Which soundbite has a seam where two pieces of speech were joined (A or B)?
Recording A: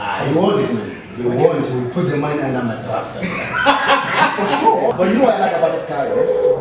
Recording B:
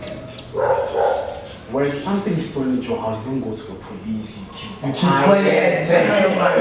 A